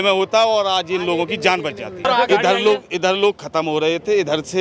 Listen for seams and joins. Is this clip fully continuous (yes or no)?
no